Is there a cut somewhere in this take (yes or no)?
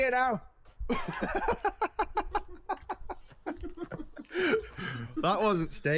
no